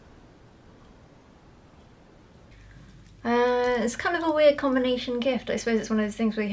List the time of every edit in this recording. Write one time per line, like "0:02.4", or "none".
0:02.5